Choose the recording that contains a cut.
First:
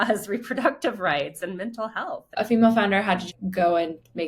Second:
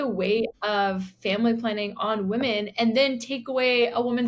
first; 2 cuts; at 2.3 s, 3.3 s

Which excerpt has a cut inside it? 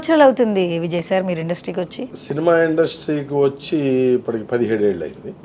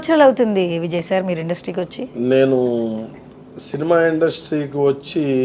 first; 1 cut; at 2.0 s

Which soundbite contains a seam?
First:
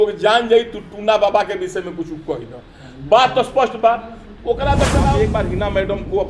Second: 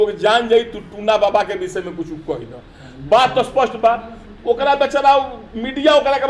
first; 1 cut; at 5.1 s

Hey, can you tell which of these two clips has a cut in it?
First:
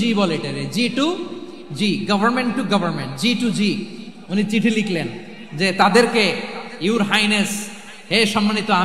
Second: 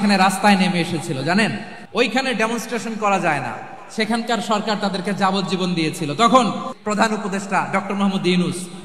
second; 2 cuts; at 1.7 s, 6.7 s

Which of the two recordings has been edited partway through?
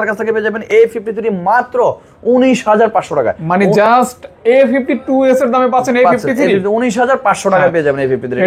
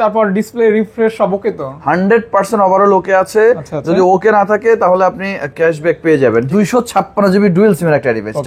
second; 1 cut; at 6.5 s

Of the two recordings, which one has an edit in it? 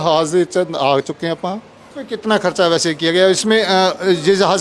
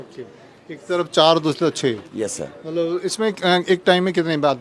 first; 1 cut; at 1.9 s

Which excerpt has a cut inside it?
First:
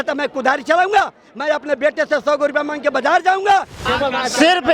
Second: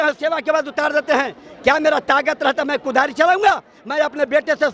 first; 1 cut; at 3.8 s

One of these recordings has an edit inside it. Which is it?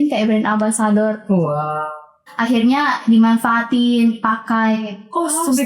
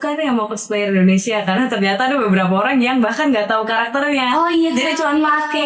first; 1 cut; at 2.2 s

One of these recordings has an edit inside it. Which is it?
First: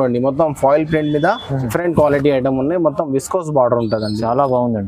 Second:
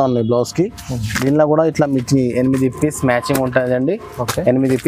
first; 1 cut; at 1.7 s

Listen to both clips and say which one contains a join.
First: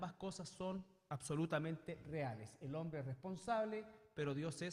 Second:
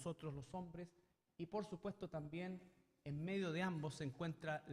second; 1 cut; at 2.7 s

